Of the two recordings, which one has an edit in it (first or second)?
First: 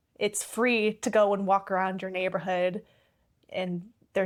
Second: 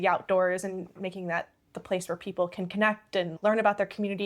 second